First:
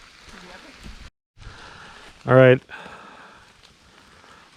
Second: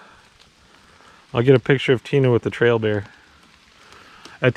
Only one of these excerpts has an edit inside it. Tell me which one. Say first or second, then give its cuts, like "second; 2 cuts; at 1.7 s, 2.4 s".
first; 1 cut; at 1.2 s